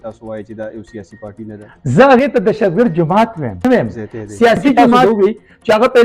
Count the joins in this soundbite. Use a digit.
2